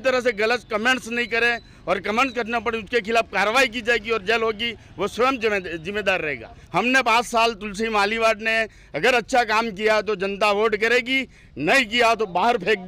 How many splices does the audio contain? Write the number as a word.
one